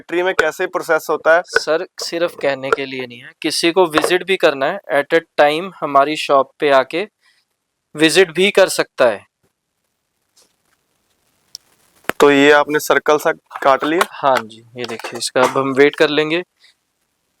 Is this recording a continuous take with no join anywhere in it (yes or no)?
yes